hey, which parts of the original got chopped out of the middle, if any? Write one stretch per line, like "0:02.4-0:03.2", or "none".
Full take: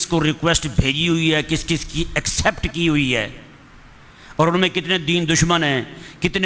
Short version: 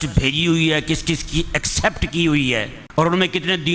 0:03.4-0:04.2